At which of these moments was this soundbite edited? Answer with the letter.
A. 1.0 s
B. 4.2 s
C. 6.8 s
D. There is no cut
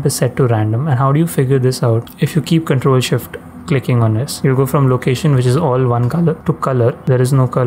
C